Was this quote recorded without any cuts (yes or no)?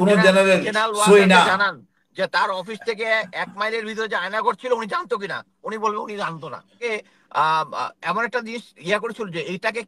no